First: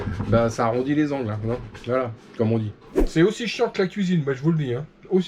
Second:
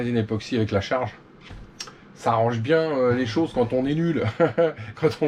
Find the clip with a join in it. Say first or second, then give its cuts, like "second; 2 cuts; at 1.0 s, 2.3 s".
first; 1 cut; at 2.8 s